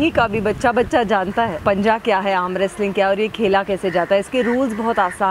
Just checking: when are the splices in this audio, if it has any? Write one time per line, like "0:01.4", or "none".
0:01.5